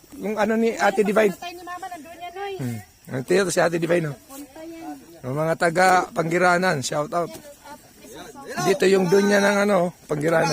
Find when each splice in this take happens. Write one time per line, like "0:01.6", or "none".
none

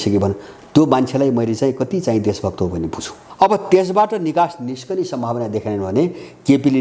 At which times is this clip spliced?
0:03.2

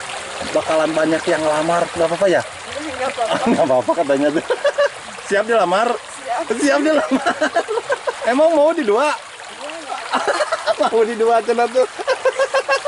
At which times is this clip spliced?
0:08.1

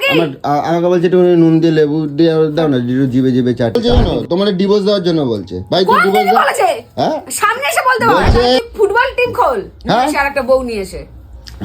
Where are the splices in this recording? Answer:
0:03.8
0:08.6

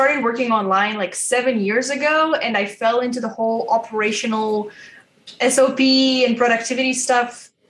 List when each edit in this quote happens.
none

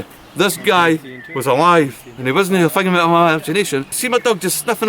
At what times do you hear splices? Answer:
0:03.9

